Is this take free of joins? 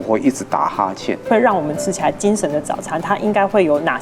no; 1 cut; at 1.3 s

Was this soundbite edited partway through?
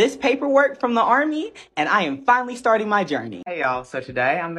yes; 1 cut; at 3.3 s

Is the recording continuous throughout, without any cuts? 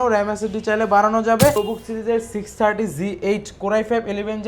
no; 1 cut; at 1.5 s

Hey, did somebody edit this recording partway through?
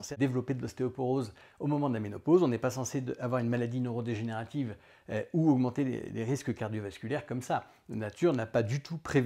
no; 0 cuts

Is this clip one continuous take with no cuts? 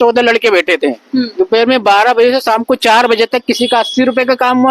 yes; 0 cuts

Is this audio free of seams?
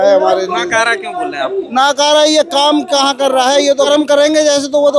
no; 1 cut; at 3.9 s

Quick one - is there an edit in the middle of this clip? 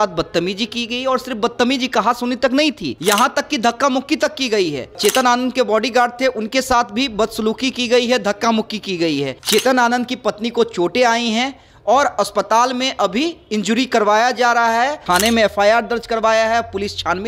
yes; 4 cuts; at 2.9 s, 5.0 s, 9.4 s, 15.0 s

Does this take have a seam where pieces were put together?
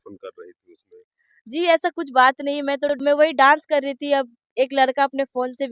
yes; 1 cut; at 2.9 s

